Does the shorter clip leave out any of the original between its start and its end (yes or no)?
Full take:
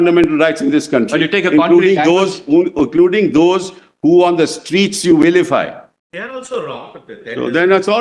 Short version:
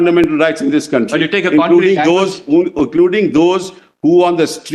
no